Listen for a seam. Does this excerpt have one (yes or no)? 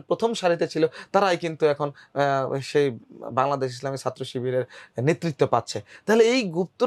no